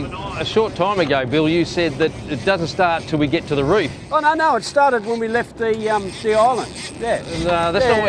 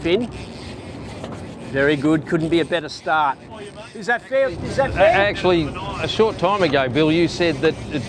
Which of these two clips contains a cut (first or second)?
second